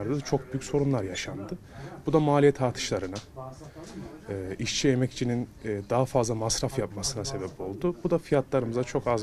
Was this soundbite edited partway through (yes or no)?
no